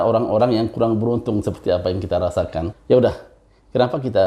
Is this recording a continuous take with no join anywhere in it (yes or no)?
no